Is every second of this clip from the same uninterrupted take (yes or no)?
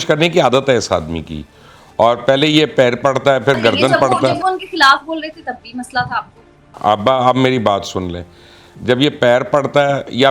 yes